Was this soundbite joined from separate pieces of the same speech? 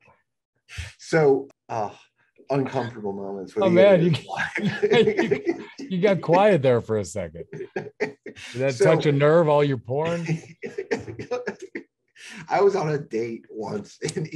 yes; 1 cut; at 1.5 s

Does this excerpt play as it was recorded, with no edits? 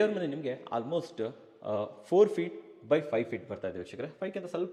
yes; 0 cuts

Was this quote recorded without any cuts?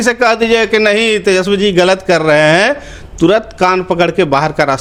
yes; 0 cuts

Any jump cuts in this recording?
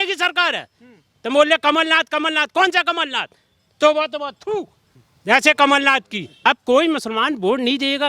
yes; 1 cut; at 6.3 s

